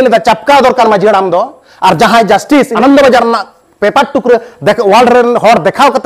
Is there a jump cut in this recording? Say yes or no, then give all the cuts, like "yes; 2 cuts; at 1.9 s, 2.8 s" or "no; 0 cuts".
yes; 1 cut; at 2.7 s